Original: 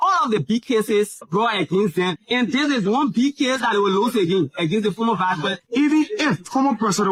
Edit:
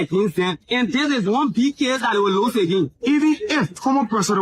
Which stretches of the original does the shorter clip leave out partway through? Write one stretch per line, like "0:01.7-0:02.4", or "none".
0:04.5-0:05.6